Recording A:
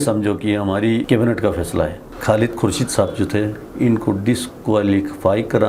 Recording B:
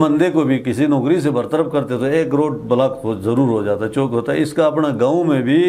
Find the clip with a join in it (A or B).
A